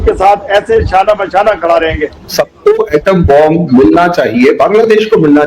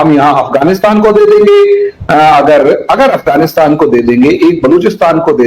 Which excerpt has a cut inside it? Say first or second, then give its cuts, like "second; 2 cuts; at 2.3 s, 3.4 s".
first; 1 cut; at 2.3 s